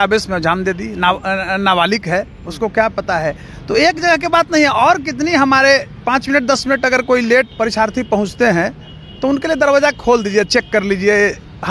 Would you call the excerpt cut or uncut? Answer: cut